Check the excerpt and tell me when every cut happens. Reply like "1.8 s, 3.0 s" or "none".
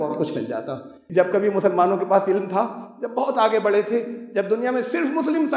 1.0 s